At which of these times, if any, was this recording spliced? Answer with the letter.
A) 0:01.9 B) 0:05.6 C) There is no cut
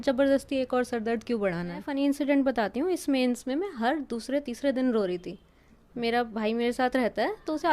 A